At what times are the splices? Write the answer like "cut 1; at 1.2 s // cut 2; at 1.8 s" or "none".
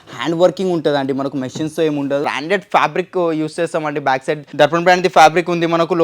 cut 1; at 2.2 s // cut 2; at 4.4 s